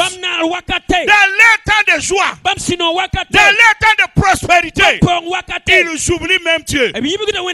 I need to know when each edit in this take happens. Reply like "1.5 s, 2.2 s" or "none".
none